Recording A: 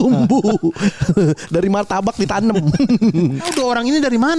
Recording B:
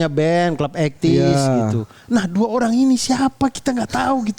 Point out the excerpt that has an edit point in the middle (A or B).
A